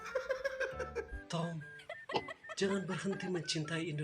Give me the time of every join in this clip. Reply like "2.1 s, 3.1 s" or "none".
1.1 s